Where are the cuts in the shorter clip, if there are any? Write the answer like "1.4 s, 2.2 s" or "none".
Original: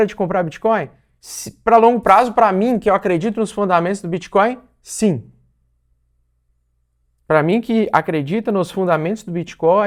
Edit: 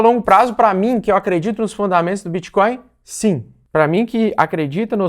3.5 s